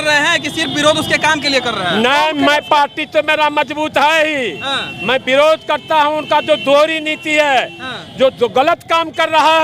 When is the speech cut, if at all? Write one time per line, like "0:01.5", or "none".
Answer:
none